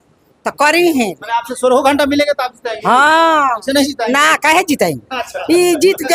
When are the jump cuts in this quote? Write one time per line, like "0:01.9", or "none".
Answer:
none

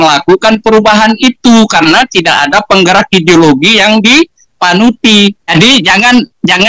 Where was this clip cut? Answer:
0:05.5

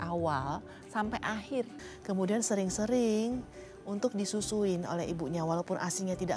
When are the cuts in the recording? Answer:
0:01.9

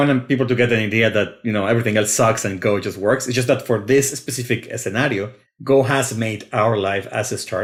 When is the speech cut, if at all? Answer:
none

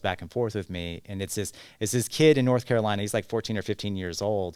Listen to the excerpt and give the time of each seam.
none

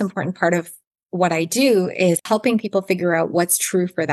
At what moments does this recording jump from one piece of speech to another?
0:02.2

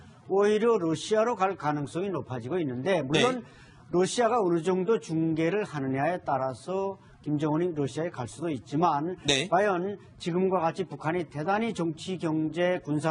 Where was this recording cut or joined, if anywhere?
none

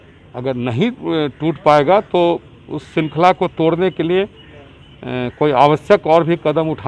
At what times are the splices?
none

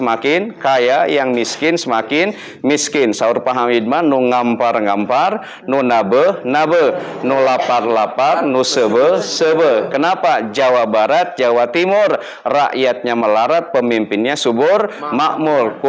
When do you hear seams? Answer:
none

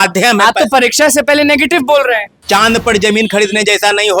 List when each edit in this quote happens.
0:02.3

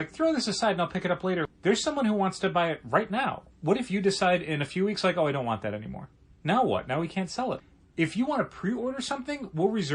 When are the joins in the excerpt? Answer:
0:01.4
0:07.6

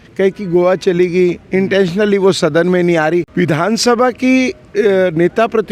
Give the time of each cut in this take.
0:03.3

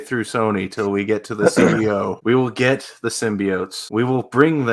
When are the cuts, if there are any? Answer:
0:02.2
0:03.8

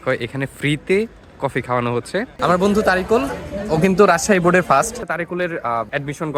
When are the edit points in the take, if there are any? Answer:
0:02.3
0:05.0

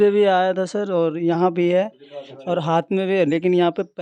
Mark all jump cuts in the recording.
none

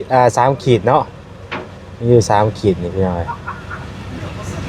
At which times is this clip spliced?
none

